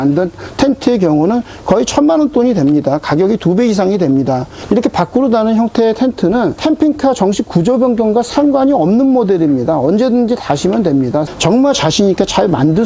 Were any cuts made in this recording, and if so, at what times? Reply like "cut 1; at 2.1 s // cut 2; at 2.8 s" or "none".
cut 1; at 4.5 s // cut 2; at 6.6 s // cut 3; at 11.3 s